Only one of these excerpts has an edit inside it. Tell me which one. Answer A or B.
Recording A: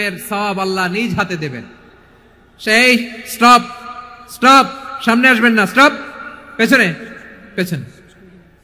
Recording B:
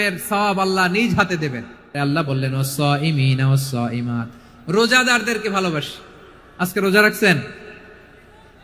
B